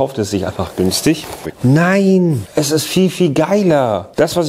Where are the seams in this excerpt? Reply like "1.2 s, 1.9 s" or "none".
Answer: 1.5 s